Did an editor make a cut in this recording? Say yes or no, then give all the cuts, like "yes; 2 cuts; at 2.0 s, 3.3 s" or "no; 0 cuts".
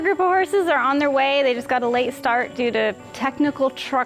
no; 0 cuts